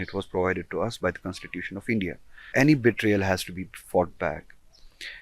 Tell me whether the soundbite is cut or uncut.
cut